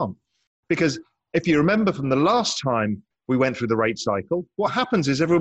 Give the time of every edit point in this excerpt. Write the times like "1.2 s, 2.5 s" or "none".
3.1 s